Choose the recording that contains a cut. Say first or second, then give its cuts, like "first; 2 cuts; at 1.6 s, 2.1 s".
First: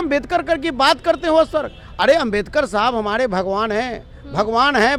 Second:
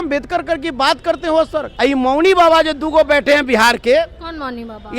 second; 1 cut; at 1.6 s